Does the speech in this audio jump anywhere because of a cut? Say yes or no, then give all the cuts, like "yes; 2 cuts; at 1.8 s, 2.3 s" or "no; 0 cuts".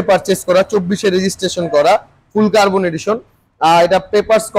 no; 0 cuts